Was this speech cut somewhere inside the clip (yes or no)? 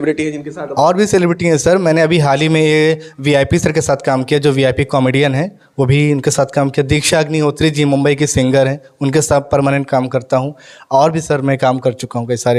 no